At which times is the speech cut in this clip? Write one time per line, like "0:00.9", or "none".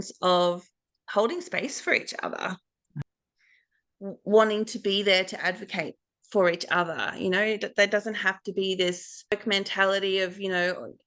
0:03.0
0:09.3